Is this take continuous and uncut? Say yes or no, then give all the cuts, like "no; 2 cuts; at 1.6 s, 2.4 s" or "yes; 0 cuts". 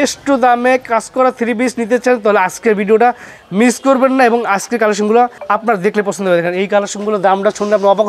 no; 1 cut; at 5.4 s